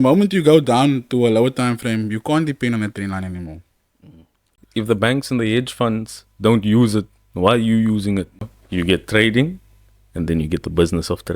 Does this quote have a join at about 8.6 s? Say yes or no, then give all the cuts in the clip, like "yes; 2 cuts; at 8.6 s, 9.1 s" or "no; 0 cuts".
yes; 2 cuts; at 4.5 s, 8.6 s